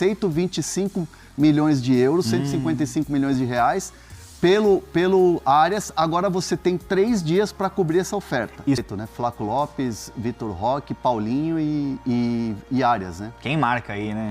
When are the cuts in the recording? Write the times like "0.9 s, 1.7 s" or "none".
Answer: 8.8 s